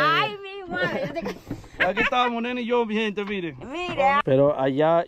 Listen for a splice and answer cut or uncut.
cut